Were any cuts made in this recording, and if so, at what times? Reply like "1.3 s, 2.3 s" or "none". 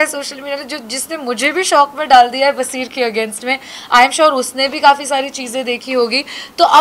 none

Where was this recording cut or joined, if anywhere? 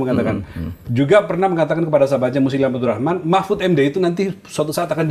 none

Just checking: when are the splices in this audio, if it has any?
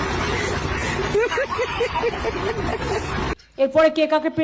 3.4 s

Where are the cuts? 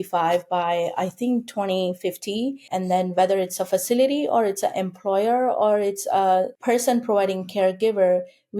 2.7 s, 6.5 s

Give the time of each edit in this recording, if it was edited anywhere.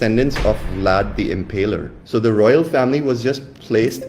2.0 s

